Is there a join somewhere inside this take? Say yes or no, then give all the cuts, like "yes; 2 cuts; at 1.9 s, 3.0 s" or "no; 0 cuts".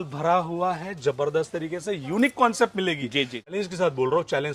yes; 1 cut; at 3.5 s